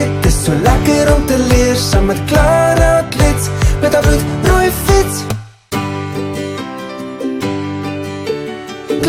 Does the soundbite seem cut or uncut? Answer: uncut